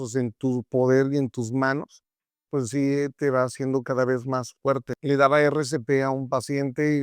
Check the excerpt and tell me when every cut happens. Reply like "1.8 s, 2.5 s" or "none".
4.9 s